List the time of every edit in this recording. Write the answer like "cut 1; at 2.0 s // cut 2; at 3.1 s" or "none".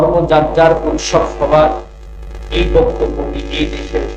none